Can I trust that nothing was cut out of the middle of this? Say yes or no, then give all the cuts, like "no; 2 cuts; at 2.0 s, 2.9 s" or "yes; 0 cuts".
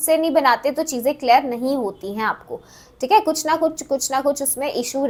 yes; 0 cuts